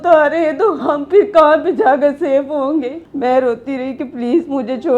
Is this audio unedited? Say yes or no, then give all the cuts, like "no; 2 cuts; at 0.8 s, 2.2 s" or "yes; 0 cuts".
no; 1 cut; at 3.0 s